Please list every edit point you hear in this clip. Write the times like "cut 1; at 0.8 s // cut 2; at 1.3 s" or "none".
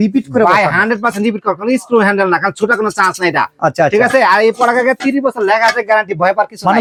none